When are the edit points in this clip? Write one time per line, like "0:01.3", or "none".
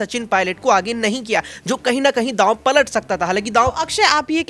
none